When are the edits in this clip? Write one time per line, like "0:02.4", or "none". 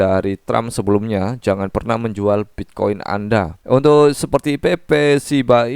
0:03.6